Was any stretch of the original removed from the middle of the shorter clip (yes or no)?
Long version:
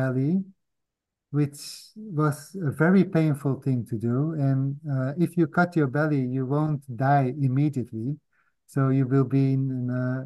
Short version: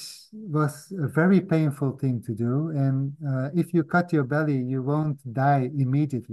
no